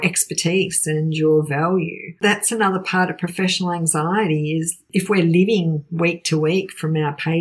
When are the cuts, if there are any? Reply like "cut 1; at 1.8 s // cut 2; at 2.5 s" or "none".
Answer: cut 1; at 2.2 s // cut 2; at 4.8 s